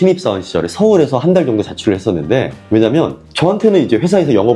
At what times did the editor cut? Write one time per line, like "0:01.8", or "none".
0:02.6